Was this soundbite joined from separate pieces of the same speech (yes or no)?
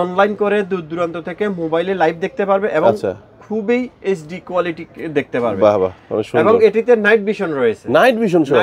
no